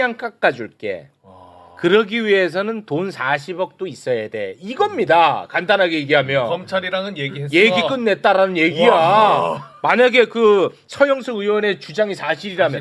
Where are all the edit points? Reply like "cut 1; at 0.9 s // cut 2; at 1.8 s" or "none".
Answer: none